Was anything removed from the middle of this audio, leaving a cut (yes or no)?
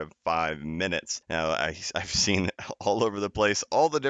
yes